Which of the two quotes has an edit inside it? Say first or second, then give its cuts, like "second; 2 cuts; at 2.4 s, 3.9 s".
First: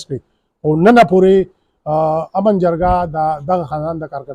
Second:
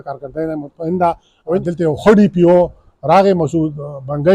second; 1 cut; at 1.6 s